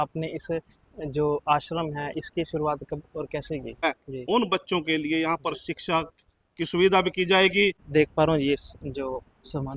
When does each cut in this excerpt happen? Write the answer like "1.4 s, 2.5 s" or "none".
3.8 s, 7.8 s